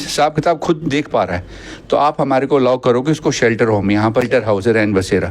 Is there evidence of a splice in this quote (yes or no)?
yes